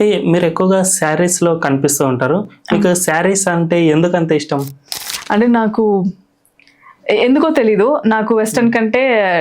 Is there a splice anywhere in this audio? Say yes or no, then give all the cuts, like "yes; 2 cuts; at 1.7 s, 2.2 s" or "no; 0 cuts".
no; 0 cuts